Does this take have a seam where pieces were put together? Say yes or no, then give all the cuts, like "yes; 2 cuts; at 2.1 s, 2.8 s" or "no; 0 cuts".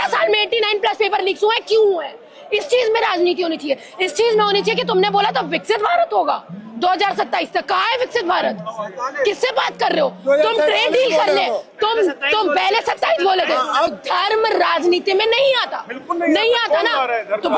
yes; 1 cut; at 13.9 s